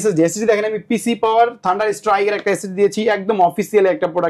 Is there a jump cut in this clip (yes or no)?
no